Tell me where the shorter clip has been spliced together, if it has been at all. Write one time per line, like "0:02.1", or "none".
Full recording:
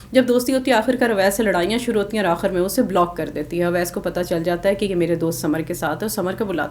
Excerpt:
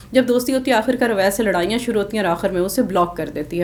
none